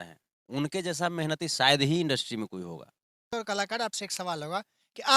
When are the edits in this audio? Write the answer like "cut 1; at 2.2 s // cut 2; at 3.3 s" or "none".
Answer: cut 1; at 3.2 s